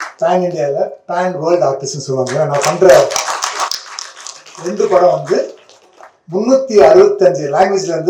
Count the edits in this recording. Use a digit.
0